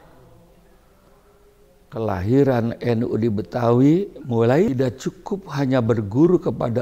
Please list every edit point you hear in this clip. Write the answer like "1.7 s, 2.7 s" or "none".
4.7 s